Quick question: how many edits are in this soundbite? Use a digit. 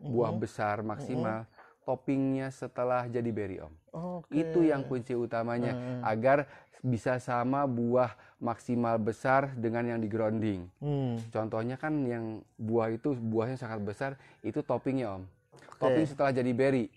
0